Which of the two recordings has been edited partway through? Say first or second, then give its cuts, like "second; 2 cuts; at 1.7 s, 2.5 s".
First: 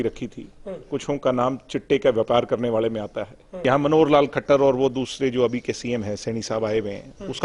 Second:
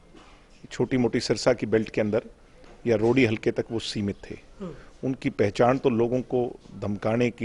first; 1 cut; at 3.6 s